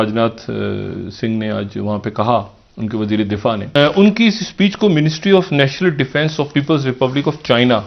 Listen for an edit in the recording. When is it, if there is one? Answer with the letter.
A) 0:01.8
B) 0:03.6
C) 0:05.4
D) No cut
B